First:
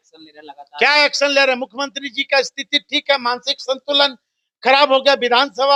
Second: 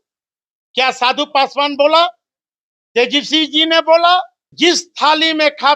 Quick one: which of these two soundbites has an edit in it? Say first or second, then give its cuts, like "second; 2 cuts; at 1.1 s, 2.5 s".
second; 1 cut; at 4.4 s